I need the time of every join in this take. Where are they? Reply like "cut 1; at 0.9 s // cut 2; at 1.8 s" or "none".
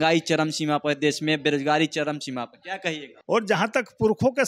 cut 1; at 3.1 s